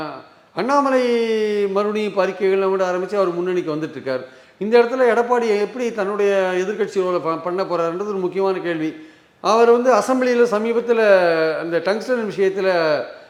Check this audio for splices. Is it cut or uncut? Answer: uncut